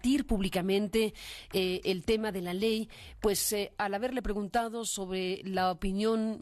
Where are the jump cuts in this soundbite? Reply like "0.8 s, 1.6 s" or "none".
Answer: 3.9 s